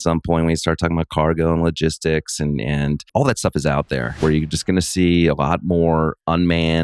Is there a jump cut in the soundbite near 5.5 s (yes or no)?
no